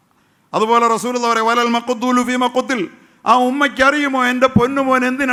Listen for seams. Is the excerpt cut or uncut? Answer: uncut